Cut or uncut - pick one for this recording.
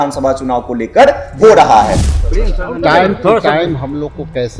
cut